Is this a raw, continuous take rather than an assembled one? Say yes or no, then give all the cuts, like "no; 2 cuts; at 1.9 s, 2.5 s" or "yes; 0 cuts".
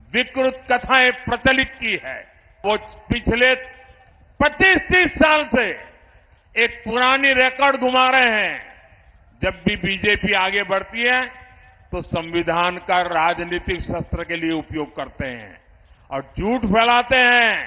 no; 1 cut; at 2.6 s